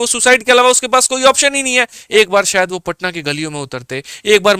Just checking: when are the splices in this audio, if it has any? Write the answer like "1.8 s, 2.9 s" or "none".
2.0 s